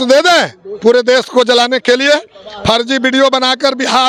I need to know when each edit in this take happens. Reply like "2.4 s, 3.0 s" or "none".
none